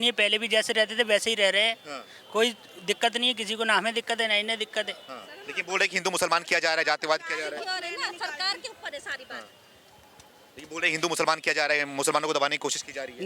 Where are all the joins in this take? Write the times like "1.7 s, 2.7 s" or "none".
none

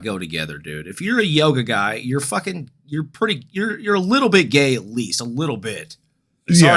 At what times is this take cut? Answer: none

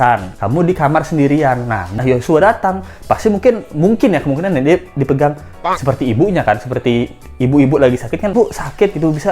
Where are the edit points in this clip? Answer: 1.9 s, 8.3 s

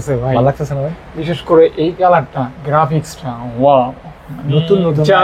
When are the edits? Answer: none

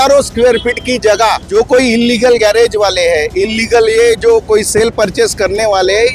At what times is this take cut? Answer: 1.4 s

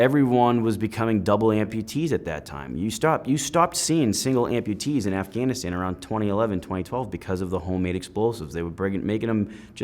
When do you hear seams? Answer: 1.7 s

